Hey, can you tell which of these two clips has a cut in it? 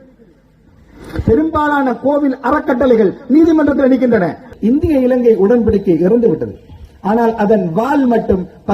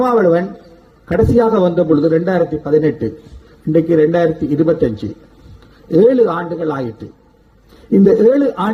first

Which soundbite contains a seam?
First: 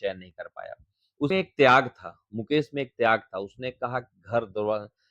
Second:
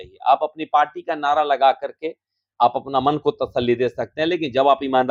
first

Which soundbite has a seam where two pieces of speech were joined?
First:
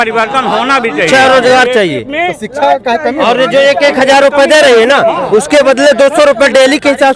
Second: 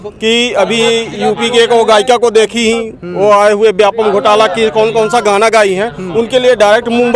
first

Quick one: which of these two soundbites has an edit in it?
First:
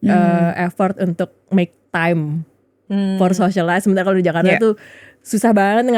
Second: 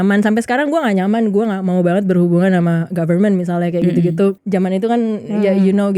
second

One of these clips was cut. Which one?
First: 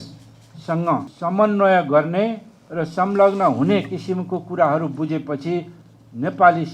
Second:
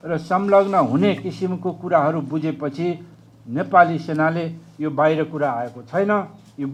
first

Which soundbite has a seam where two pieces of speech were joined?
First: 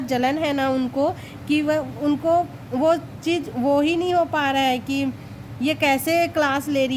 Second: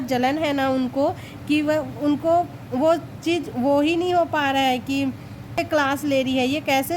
second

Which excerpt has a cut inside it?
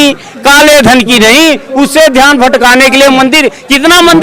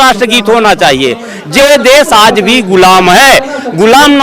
second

